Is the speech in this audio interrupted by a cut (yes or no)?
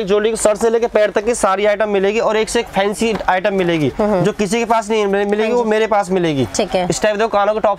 no